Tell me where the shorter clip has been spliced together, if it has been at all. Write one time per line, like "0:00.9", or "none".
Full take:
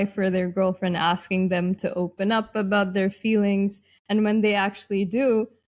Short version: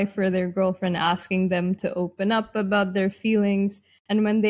none